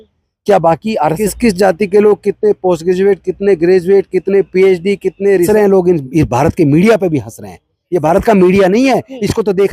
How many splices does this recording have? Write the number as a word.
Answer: two